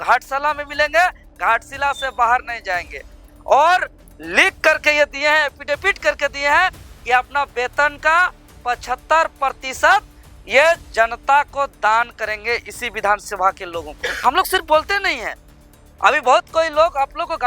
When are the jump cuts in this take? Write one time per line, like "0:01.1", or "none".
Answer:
0:14.2